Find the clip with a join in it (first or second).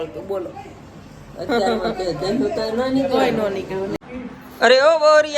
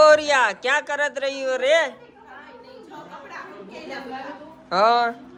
first